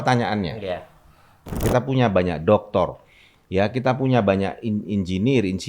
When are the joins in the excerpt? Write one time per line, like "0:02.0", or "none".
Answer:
0:01.6